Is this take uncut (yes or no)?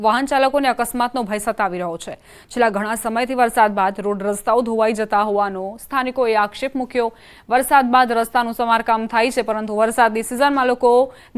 yes